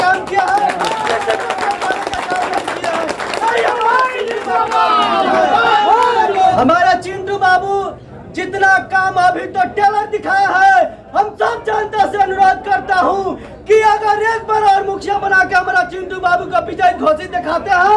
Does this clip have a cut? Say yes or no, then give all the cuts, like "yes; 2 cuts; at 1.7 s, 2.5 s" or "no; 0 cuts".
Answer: no; 0 cuts